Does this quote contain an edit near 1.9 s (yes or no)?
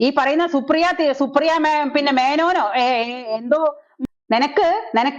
no